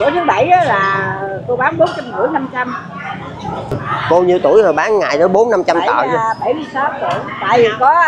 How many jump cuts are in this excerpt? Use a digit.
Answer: 1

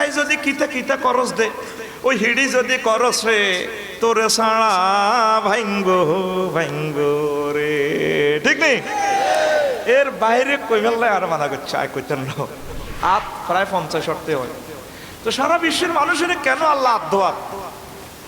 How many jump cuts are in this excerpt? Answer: 1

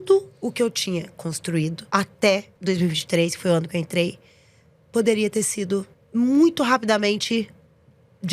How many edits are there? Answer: 3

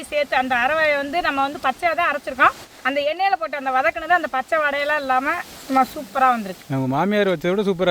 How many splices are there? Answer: 2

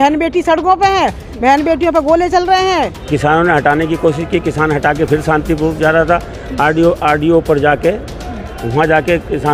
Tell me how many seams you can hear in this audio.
1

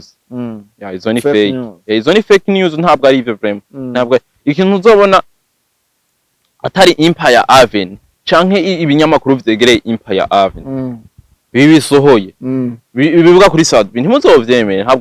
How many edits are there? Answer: 0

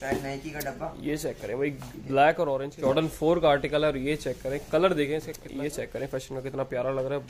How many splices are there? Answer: 2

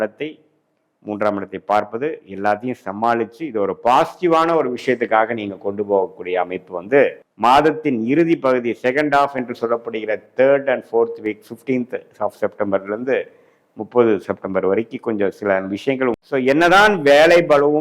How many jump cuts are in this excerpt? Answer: 2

